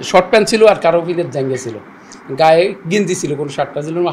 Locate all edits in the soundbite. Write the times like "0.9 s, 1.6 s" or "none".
none